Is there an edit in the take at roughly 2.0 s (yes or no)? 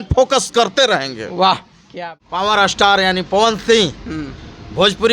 yes